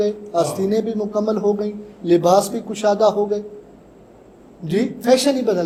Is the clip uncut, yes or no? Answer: yes